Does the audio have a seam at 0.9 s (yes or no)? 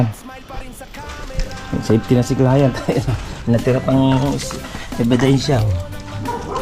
yes